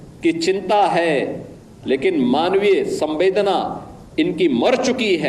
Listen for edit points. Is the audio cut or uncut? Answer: uncut